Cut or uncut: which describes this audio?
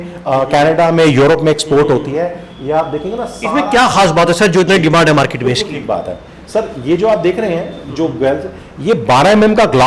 uncut